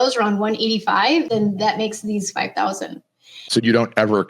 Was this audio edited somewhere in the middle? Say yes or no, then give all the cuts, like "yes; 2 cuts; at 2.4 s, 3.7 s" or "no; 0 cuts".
yes; 2 cuts; at 1.3 s, 3.5 s